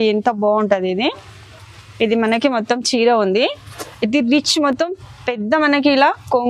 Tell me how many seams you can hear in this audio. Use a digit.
0